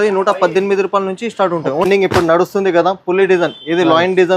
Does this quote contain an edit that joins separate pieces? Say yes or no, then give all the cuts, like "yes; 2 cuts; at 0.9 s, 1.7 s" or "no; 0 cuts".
yes; 1 cut; at 1.8 s